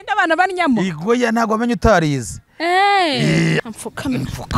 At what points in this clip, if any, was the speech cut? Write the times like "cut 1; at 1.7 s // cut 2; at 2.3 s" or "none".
cut 1; at 3.6 s